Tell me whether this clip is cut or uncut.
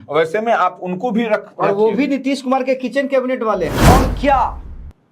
cut